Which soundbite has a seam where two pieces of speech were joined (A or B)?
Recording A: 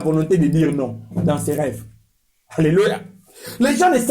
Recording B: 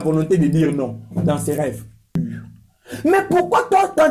B